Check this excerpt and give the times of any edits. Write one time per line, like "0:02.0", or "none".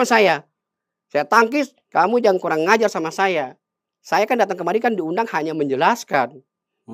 0:01.8